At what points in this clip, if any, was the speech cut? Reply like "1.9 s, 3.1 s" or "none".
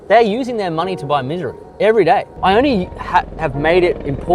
1.6 s, 2.3 s